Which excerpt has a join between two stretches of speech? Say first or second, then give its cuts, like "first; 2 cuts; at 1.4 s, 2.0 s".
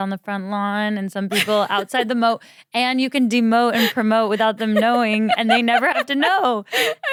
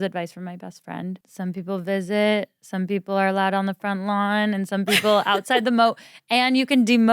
second; 1 cut; at 1.2 s